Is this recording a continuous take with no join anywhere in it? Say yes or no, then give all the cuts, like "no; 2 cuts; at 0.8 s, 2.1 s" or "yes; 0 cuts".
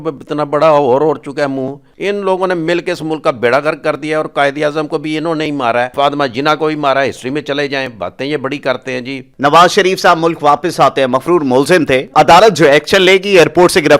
no; 4 cuts; at 1.8 s, 5.9 s, 9.2 s, 12.1 s